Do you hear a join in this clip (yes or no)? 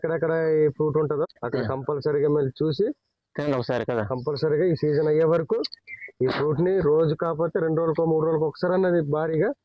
no